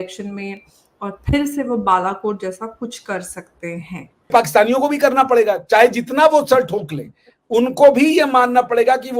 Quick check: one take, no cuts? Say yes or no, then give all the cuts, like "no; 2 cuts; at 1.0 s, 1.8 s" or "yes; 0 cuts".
no; 1 cut; at 4.3 s